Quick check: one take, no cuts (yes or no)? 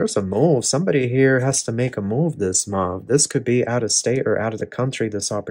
yes